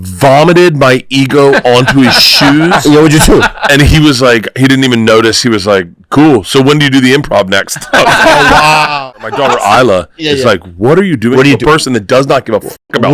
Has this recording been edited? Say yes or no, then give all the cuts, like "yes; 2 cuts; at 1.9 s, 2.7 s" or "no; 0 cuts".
yes; 1 cut; at 9.0 s